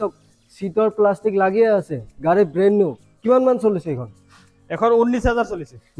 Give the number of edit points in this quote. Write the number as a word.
zero